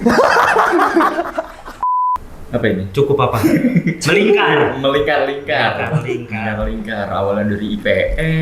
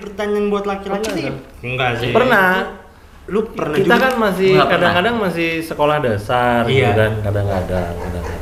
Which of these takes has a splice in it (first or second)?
first